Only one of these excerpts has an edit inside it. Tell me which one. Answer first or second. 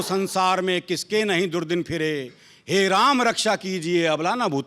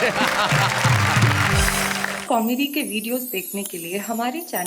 second